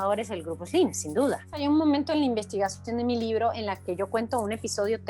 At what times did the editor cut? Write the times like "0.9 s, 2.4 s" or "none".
1.6 s